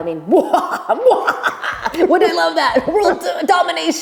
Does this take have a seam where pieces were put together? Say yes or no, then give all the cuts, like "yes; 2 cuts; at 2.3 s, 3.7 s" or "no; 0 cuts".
no; 0 cuts